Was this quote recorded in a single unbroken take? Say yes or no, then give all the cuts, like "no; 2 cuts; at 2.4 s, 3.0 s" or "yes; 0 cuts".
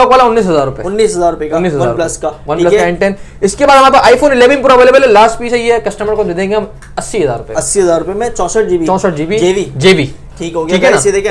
yes; 0 cuts